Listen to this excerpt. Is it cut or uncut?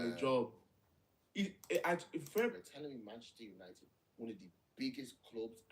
cut